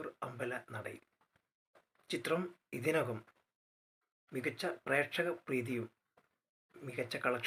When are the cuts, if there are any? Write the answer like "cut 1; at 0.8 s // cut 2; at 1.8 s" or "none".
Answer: none